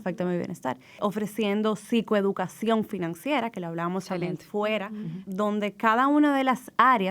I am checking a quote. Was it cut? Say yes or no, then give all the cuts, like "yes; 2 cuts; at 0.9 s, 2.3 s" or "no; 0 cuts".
yes; 2 cuts; at 1.0 s, 5.2 s